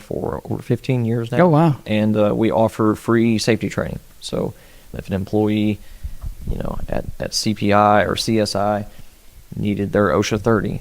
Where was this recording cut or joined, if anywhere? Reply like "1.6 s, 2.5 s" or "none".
4.9 s